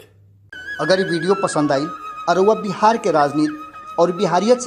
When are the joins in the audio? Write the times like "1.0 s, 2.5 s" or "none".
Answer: none